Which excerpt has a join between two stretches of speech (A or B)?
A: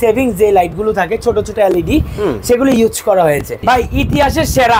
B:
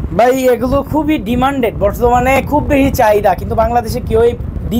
A